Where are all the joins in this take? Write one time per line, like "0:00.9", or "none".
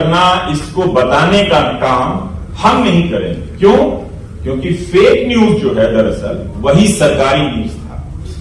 none